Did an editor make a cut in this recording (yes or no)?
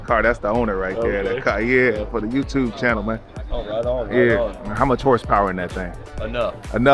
no